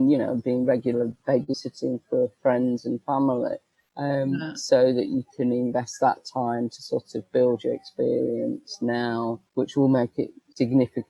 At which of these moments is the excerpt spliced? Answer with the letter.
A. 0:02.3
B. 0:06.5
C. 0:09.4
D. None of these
C